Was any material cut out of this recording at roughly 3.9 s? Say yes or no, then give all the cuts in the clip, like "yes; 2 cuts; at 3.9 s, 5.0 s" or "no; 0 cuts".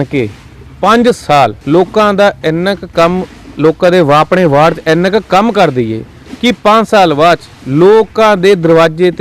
no; 1 cut; at 1.6 s